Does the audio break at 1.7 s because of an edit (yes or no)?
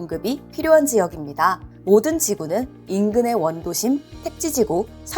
yes